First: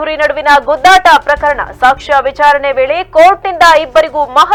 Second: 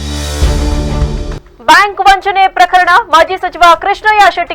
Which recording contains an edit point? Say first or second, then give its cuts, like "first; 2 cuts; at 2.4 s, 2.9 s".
second; 1 cut; at 1.3 s